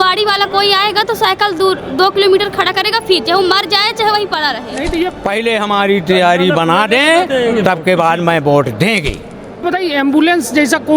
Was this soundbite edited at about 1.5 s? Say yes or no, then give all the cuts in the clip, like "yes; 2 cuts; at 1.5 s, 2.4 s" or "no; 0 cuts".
no; 2 cuts; at 5.1 s, 9.6 s